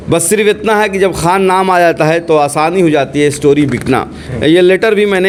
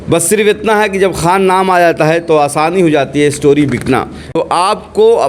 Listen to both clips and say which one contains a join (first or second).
second